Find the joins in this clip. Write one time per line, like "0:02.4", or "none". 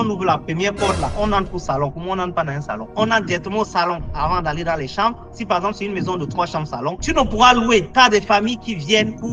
0:02.9